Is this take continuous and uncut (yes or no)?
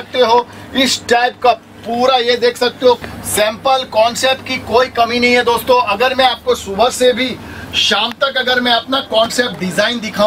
no